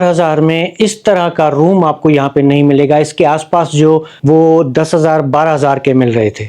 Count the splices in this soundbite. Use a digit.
1